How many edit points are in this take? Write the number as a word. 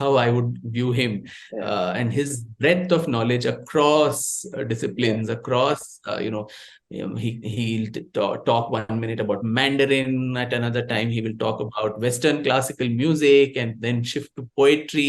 zero